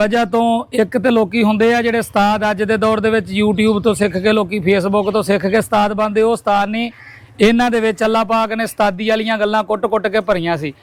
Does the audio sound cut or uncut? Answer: uncut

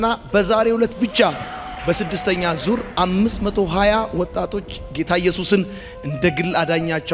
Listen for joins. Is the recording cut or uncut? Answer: uncut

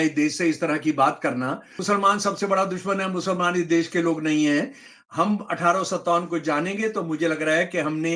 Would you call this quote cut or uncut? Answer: cut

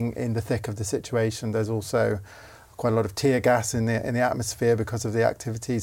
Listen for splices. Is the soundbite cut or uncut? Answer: uncut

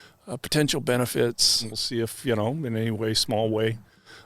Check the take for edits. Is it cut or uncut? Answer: cut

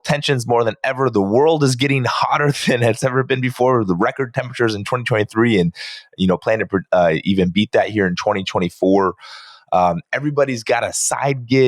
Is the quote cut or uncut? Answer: uncut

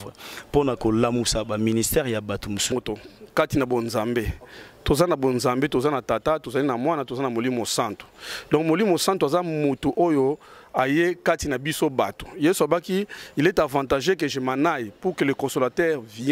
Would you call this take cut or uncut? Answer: cut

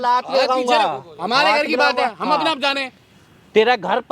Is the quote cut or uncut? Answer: uncut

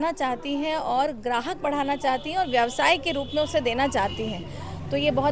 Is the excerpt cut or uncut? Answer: uncut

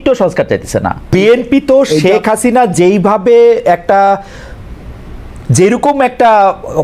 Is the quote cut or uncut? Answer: cut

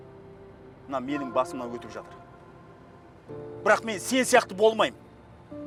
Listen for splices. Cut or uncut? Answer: uncut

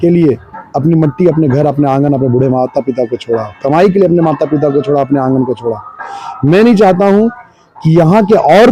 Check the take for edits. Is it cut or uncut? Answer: uncut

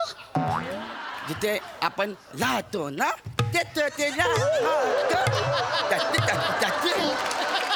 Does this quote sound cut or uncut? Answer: uncut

